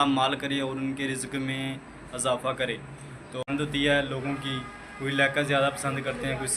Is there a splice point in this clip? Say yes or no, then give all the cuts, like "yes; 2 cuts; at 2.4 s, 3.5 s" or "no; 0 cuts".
yes; 1 cut; at 3.5 s